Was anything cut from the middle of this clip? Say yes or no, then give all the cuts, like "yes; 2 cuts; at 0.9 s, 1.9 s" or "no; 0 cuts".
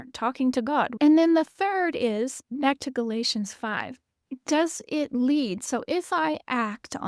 yes; 1 cut; at 0.9 s